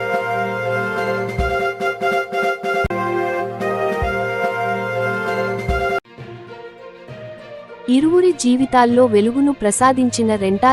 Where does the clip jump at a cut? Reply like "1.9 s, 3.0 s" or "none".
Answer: 1.7 s, 2.9 s, 6.0 s